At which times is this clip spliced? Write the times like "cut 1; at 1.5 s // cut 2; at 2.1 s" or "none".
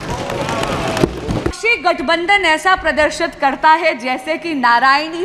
cut 1; at 1.6 s